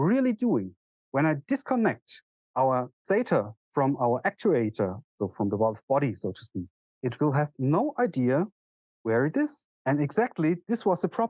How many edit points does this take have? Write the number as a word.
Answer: zero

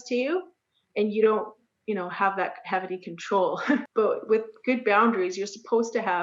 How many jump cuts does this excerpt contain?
one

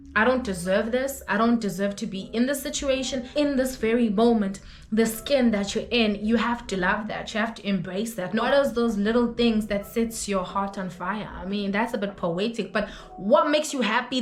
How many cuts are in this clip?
two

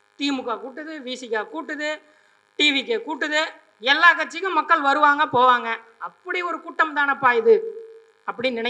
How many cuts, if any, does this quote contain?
zero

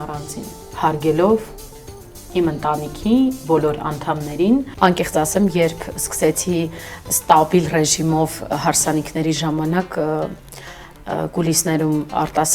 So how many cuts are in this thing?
one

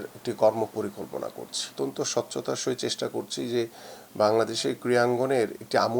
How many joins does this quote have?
one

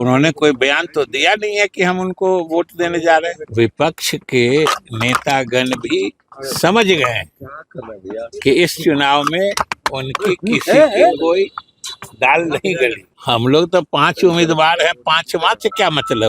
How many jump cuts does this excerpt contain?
two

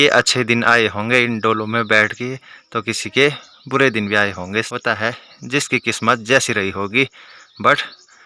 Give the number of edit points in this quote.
one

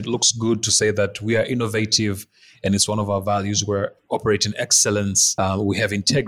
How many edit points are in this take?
one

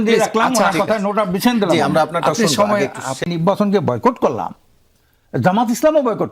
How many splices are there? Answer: one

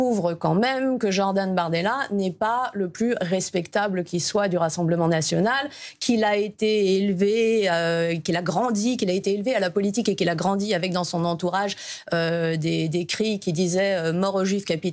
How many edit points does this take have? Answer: zero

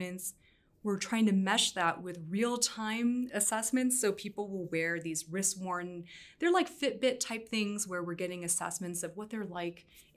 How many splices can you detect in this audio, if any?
one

